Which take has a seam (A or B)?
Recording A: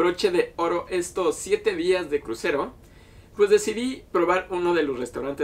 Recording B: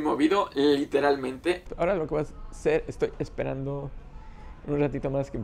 B